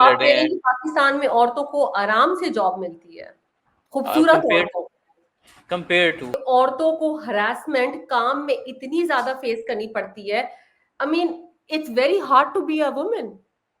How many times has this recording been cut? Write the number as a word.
one